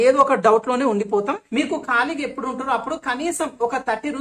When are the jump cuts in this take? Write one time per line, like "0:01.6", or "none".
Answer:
0:01.4

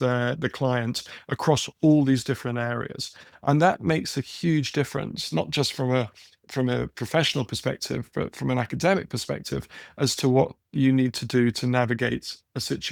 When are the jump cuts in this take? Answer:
none

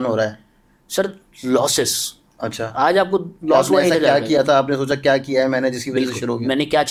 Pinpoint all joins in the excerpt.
none

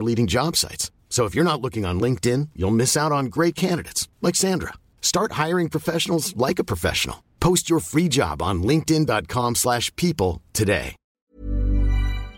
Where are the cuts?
0:11.3

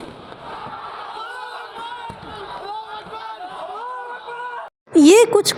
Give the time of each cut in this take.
none

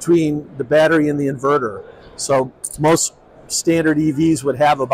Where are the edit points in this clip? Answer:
none

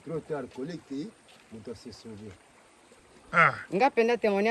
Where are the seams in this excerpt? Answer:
0:03.1

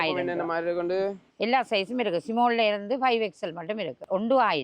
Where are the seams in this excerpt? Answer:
0:01.3

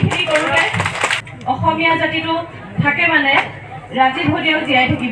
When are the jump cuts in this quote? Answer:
0:01.2

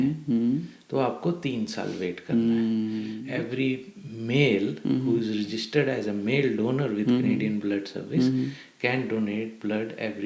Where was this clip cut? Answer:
0:03.2

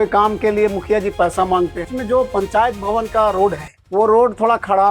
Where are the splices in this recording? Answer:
0:01.9

